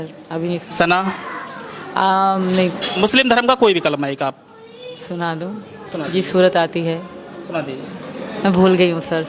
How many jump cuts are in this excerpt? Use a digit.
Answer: 1